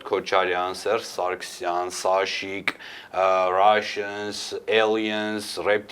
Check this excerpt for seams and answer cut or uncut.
uncut